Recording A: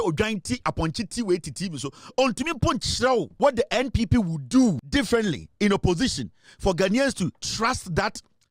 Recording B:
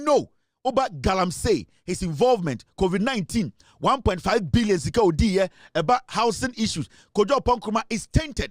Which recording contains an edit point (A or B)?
A